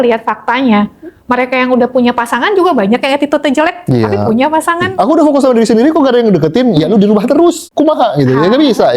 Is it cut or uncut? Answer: cut